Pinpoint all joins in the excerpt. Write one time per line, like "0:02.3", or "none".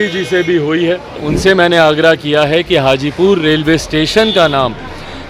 0:01.3